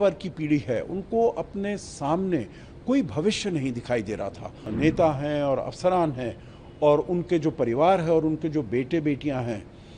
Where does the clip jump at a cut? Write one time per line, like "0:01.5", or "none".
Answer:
0:04.7